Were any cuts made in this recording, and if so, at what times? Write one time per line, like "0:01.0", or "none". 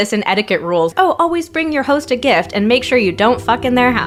none